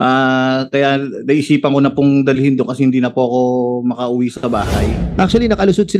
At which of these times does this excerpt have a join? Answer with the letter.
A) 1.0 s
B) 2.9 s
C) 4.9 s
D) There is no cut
C